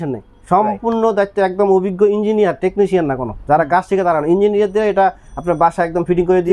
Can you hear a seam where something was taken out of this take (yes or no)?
no